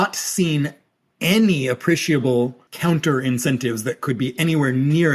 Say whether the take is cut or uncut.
cut